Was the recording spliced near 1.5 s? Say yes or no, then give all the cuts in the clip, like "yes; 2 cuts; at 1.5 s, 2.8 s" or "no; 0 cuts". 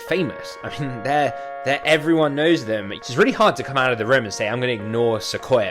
no; 1 cut; at 2.9 s